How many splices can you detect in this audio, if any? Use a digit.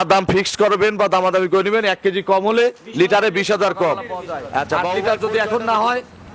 1